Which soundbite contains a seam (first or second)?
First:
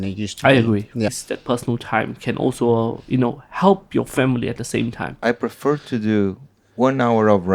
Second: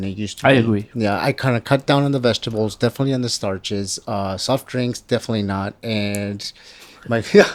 first